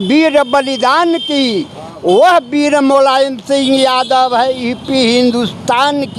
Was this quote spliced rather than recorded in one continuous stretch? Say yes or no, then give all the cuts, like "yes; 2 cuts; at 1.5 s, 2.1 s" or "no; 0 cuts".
no; 0 cuts